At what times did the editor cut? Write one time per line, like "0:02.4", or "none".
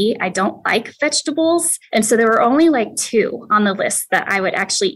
0:01.8